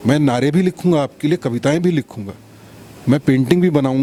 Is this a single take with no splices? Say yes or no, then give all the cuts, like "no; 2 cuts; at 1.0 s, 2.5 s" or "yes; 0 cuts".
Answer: yes; 0 cuts